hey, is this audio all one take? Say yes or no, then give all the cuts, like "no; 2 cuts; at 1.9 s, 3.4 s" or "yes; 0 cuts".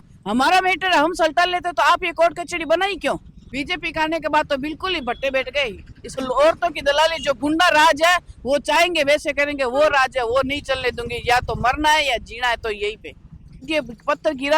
no; 3 cuts; at 3.3 s, 6.2 s, 13.7 s